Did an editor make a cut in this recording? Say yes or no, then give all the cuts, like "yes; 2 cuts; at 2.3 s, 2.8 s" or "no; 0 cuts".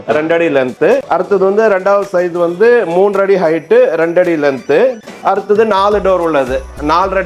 no; 0 cuts